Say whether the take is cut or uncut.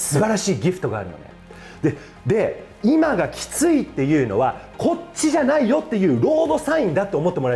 uncut